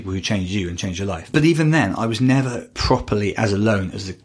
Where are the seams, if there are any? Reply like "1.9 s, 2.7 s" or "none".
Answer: 1.2 s, 2.7 s